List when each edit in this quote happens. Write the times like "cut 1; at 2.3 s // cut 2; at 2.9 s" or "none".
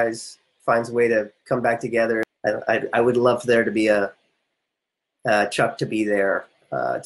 cut 1; at 2.3 s